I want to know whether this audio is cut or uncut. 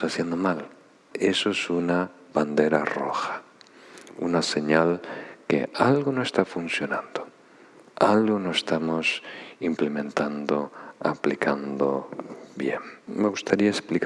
cut